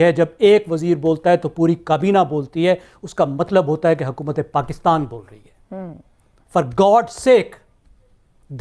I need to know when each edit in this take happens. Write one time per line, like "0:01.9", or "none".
none